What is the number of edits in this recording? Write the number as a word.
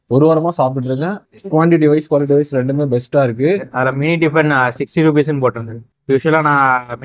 one